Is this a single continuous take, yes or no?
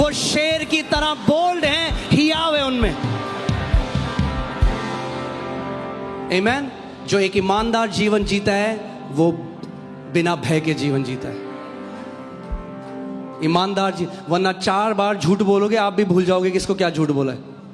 yes